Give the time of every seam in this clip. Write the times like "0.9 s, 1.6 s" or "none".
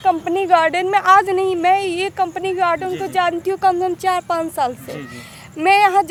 none